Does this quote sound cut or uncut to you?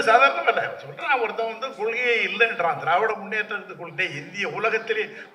uncut